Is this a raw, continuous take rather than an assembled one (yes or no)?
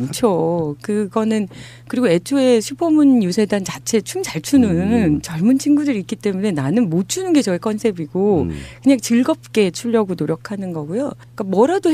yes